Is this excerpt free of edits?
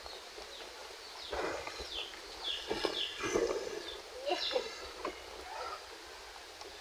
yes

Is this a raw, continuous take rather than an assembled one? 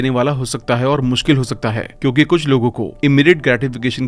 yes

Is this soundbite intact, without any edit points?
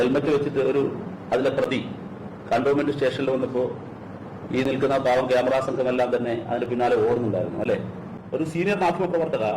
no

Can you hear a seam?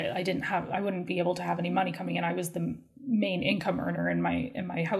no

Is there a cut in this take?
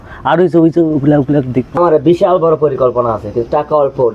yes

